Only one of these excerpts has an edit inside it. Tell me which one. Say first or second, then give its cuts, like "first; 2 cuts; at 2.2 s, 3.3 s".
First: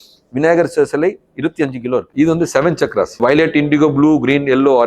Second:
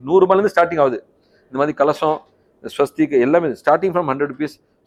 first; 2 cuts; at 2.1 s, 3.2 s